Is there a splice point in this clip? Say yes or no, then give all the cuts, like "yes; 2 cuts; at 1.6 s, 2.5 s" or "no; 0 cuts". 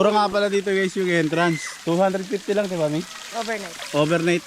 no; 0 cuts